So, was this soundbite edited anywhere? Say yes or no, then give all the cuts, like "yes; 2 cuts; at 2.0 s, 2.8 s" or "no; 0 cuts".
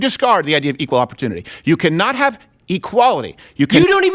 no; 0 cuts